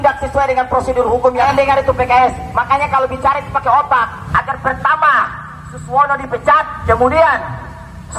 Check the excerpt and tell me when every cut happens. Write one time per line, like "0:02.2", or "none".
0:01.4
0:04.2
0:06.7